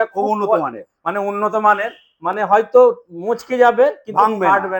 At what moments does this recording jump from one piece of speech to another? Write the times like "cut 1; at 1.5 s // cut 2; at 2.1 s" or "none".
none